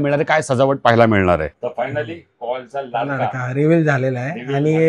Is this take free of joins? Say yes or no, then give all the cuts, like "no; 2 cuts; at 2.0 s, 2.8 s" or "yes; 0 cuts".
no; 1 cut; at 1.5 s